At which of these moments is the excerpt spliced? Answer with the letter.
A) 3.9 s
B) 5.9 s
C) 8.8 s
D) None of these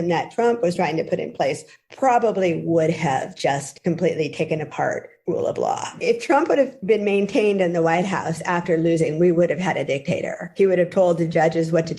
B